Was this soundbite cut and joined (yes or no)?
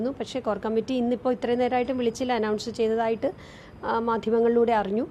no